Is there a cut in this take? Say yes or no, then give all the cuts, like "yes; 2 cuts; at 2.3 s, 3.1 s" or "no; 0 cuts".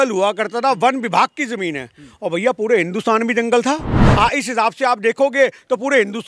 yes; 1 cut; at 4.0 s